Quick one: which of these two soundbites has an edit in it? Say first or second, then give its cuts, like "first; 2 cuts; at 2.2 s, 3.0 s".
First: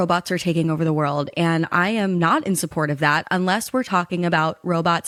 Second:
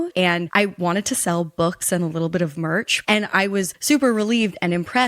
second; 1 cut; at 3.0 s